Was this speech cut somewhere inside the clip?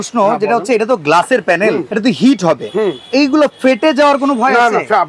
yes; 1 cut; at 1.9 s

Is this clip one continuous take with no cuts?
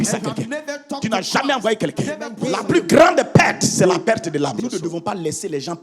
no; 2 cuts; at 2.3 s, 4.5 s

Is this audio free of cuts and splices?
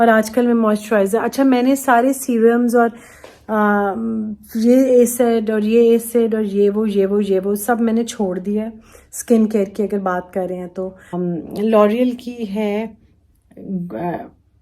no; 1 cut; at 11.1 s

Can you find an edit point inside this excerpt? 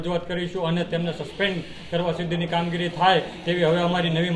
no; 0 cuts

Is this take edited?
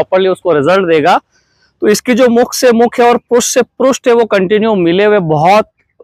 no; 0 cuts

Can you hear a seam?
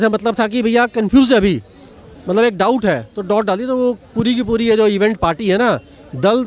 no; 0 cuts

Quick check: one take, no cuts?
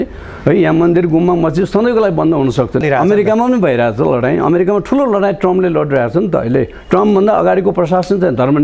no; 1 cut; at 2.8 s

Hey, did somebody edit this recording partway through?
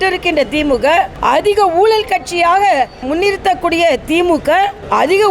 yes; 1 cut; at 3.0 s

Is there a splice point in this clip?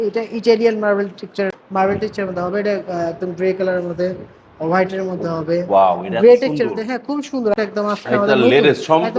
yes; 2 cuts; at 1.5 s, 7.6 s

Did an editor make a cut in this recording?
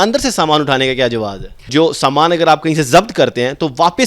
yes; 1 cut; at 1.7 s

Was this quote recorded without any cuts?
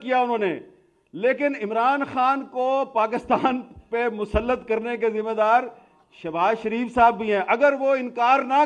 yes; 0 cuts

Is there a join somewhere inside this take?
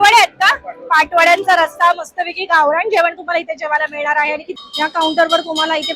yes; 1 cut; at 4.5 s

